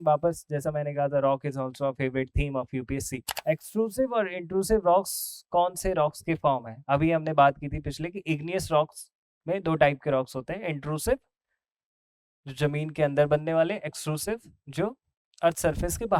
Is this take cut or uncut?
cut